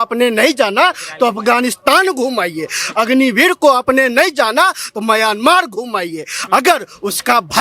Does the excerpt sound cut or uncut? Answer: cut